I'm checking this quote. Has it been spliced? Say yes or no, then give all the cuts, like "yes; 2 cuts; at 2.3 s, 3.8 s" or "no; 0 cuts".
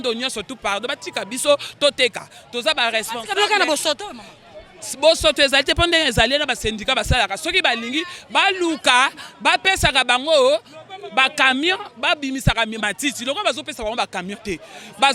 no; 0 cuts